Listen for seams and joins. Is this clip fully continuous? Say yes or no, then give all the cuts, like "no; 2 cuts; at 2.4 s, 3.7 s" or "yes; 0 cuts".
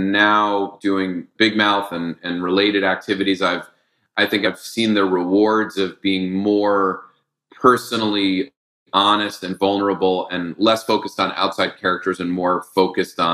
no; 2 cuts; at 1.3 s, 4.4 s